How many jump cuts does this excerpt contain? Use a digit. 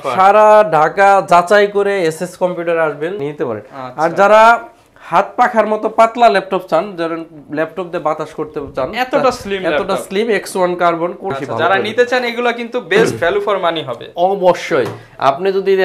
2